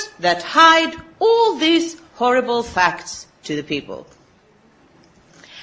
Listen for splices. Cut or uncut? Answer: cut